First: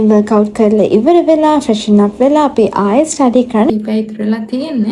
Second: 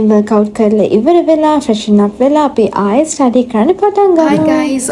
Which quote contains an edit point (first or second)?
first